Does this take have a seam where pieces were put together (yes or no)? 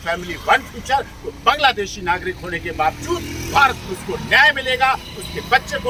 no